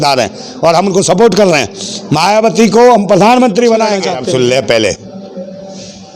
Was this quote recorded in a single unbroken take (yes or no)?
no